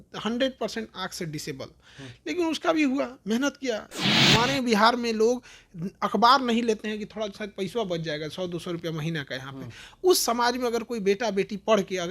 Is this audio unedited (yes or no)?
no